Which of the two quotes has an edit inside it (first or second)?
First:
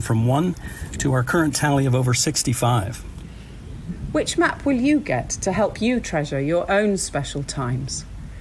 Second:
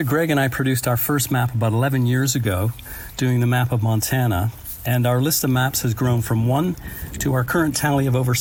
first